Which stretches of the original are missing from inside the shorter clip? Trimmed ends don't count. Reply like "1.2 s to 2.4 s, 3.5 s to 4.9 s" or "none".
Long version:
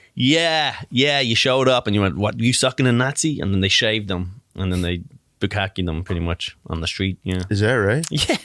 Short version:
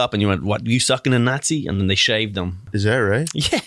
4.4 s to 7.4 s